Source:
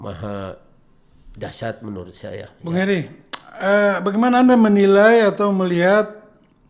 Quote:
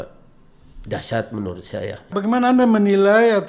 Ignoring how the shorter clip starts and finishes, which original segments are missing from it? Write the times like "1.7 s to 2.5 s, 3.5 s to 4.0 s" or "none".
2.6 s to 4.0 s